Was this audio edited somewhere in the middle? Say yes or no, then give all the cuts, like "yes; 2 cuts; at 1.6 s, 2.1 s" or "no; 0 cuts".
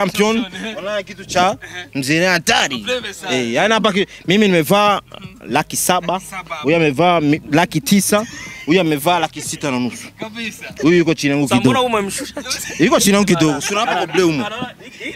no; 0 cuts